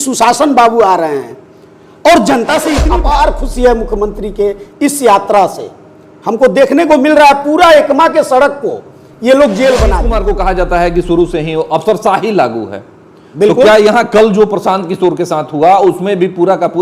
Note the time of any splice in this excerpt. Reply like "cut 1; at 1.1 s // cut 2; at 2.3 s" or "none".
cut 1; at 2.8 s // cut 2; at 10.1 s